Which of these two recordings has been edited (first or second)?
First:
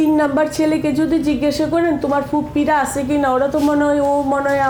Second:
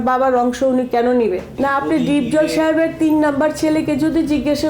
second